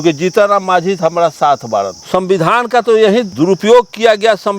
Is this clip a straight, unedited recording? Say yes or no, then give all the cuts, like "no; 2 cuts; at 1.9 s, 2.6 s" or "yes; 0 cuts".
no; 2 cuts; at 2.0 s, 3.3 s